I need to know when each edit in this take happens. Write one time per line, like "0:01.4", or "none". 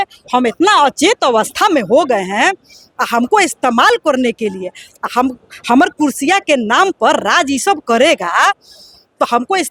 none